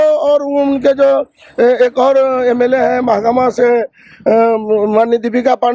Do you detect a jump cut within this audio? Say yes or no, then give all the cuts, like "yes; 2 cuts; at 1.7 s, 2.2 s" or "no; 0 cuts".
no; 0 cuts